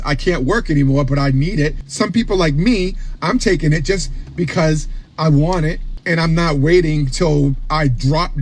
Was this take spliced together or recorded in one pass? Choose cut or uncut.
cut